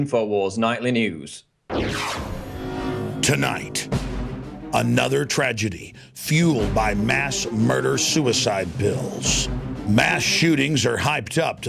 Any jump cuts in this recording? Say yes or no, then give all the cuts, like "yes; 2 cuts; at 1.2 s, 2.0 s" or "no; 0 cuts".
no; 0 cuts